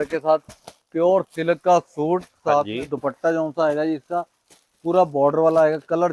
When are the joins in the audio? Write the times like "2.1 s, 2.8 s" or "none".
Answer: none